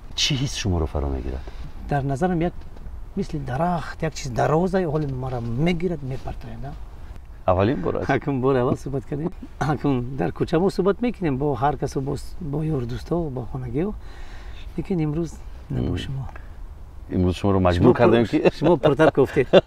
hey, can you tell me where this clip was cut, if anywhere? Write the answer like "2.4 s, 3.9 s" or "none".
1.7 s, 7.2 s, 9.4 s